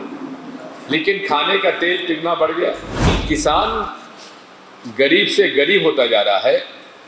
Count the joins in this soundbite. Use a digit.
1